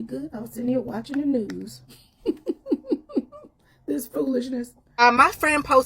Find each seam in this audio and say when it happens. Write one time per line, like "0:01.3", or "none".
0:04.8

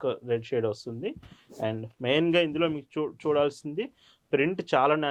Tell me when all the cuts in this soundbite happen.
none

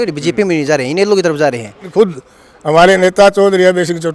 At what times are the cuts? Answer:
0:01.9

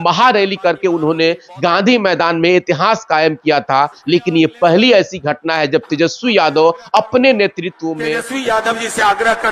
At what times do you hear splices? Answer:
0:08.0

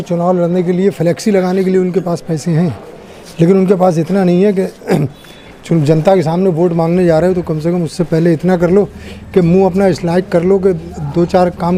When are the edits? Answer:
none

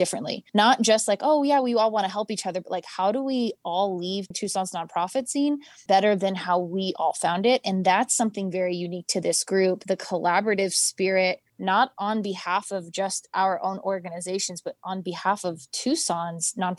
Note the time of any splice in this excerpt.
none

